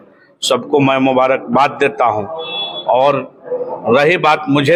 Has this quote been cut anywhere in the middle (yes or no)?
no